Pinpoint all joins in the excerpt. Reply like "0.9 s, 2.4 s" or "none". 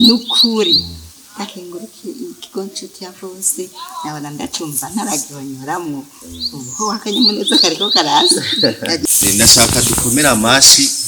9.0 s